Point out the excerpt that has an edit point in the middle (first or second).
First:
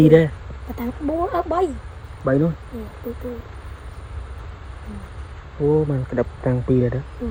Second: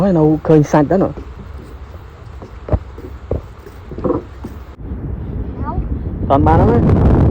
second